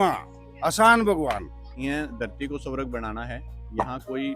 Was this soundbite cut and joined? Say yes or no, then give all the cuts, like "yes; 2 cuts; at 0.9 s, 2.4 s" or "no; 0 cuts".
yes; 1 cut; at 1.5 s